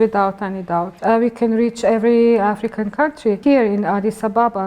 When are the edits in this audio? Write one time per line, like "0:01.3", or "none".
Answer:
0:00.9
0:03.4